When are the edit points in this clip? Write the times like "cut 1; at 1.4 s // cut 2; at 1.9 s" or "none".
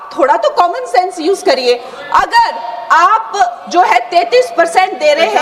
none